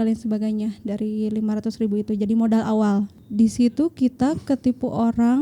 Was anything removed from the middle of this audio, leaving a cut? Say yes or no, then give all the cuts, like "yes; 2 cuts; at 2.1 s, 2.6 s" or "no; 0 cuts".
yes; 1 cut; at 3.2 s